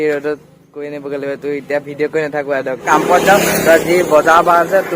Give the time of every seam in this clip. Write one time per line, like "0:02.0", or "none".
0:02.8